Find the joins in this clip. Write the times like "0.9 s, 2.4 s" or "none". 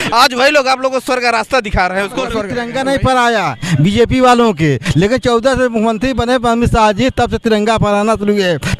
2.5 s